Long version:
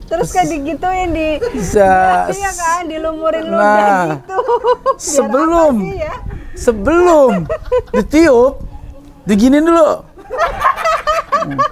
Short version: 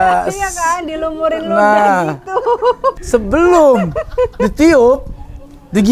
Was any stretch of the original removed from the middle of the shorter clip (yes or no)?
yes